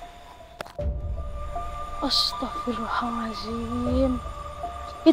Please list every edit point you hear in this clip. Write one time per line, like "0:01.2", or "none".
0:02.0